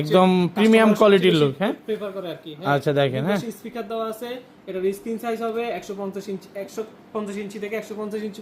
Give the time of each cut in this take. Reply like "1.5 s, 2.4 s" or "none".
none

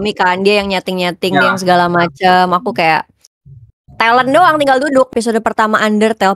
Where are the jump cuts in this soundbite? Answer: 5.1 s

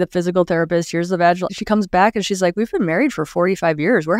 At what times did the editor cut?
none

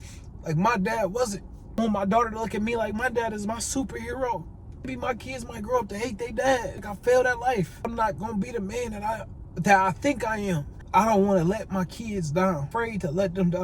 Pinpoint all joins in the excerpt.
1.8 s, 4.9 s, 6.7 s, 7.9 s, 10.7 s, 12.7 s

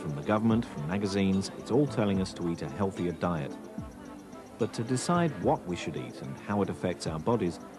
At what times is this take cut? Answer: 1.0 s

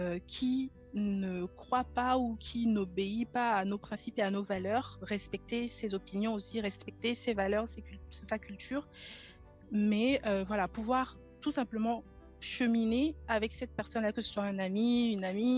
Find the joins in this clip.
none

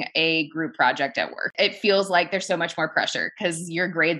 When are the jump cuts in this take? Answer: 1.5 s

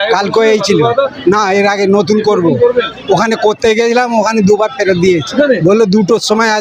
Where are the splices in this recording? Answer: 5.3 s

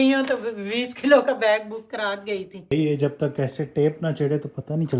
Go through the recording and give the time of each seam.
2.5 s

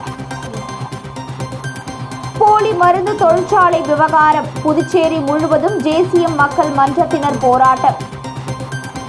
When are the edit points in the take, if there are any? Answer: 2.0 s

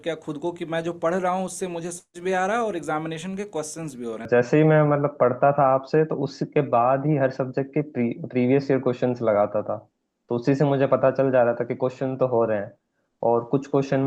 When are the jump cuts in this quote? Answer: 4.3 s

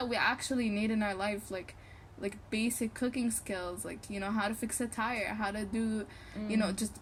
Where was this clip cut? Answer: none

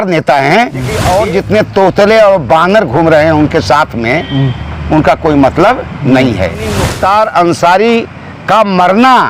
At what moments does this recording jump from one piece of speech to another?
1.1 s, 6.9 s

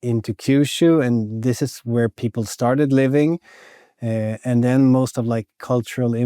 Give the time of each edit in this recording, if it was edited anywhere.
none

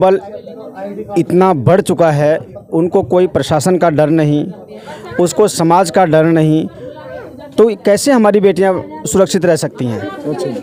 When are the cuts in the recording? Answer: none

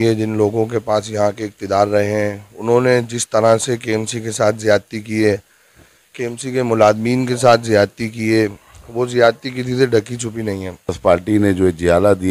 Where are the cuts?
11.0 s

